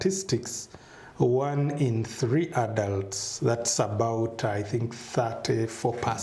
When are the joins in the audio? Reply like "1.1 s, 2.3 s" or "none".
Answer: none